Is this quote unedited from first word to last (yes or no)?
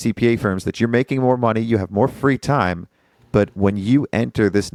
yes